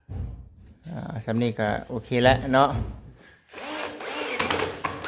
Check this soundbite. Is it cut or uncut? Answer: cut